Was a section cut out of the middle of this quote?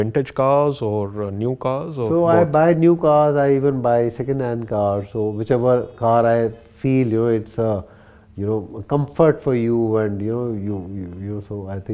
no; 0 cuts

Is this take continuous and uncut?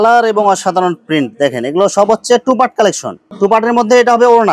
yes; 0 cuts

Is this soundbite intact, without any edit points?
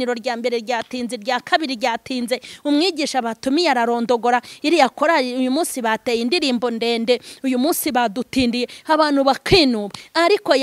yes; 0 cuts

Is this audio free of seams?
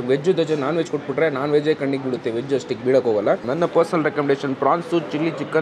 no; 1 cut; at 3.5 s

